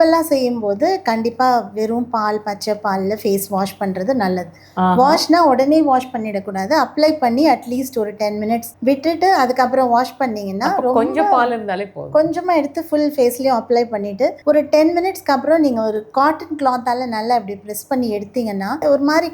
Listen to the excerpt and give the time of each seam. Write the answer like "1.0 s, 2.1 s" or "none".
8.7 s, 14.4 s